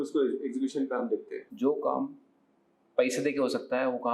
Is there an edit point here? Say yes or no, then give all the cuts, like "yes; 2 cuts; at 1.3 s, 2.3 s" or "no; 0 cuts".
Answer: yes; 1 cut; at 1.4 s